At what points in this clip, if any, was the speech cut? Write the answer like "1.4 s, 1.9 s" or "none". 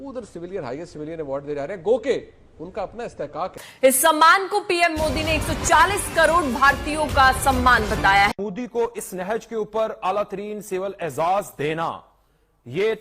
3.6 s, 8.3 s